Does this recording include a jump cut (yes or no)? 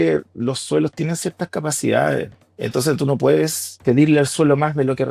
yes